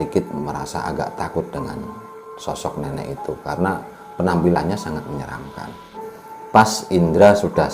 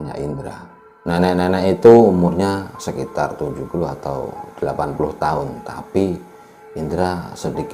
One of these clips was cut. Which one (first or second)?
first